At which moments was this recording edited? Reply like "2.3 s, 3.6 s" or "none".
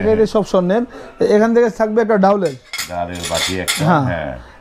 none